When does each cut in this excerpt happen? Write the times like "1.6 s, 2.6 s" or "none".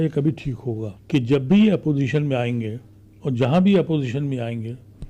0.9 s